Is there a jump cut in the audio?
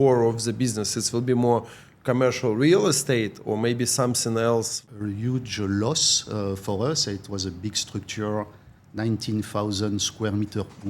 yes; 1 cut; at 4.8 s

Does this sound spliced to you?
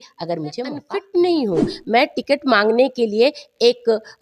yes; 1 cut; at 0.9 s

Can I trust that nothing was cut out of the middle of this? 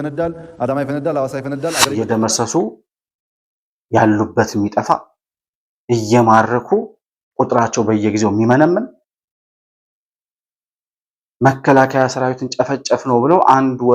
no; 1 cut; at 1.9 s

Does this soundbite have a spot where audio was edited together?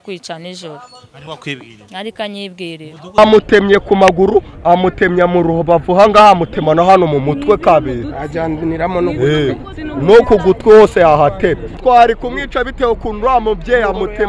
yes; 1 cut; at 3.2 s

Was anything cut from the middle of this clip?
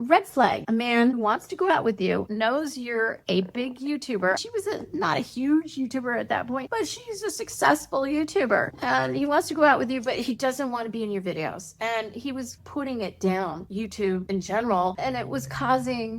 no; 0 cuts

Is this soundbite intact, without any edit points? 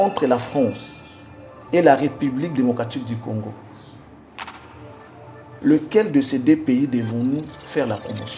yes; 0 cuts

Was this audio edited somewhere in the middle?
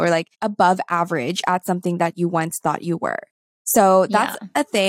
no; 0 cuts

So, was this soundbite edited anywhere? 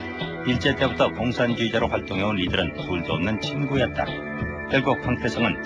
no; 0 cuts

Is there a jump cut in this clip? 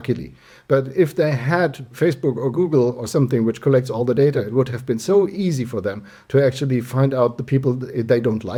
no; 0 cuts

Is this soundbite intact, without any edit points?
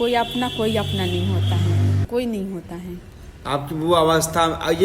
no; 1 cut; at 2.0 s

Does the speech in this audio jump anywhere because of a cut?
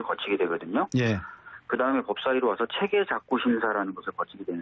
no; 0 cuts

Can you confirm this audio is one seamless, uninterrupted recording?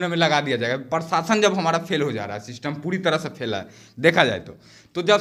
yes; 0 cuts

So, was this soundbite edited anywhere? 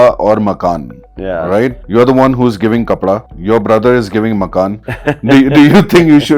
yes; 3 cuts; at 1.8 s, 3.3 s, 4.9 s

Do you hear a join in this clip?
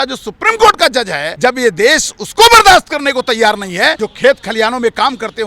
yes; 2 cuts; at 1.2 s, 4.0 s

